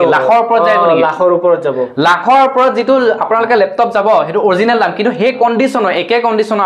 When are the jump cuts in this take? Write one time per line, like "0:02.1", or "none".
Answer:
none

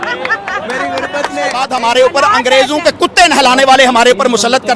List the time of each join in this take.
0:01.6

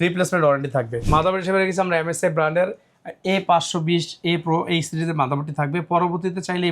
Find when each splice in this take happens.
0:01.0

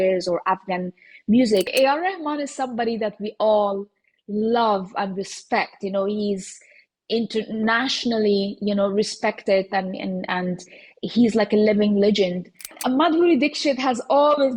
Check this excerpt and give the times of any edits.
0:01.7
0:12.8

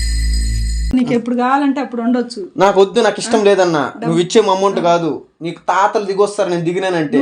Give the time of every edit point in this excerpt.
0:00.9

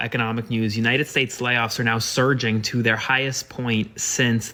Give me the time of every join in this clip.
none

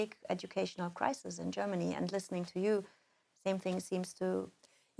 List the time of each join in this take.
none

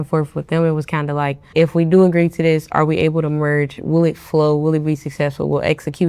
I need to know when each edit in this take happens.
0:01.4

